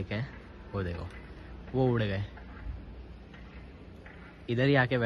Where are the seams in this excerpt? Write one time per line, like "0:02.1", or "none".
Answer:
none